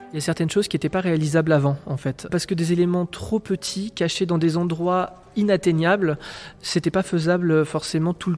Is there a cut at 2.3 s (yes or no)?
yes